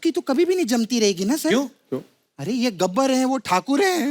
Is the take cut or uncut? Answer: uncut